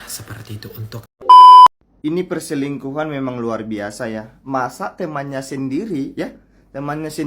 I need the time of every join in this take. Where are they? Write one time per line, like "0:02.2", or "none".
0:01.1
0:01.8